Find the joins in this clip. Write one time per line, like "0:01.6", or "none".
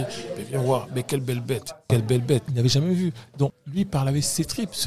0:02.5
0:03.6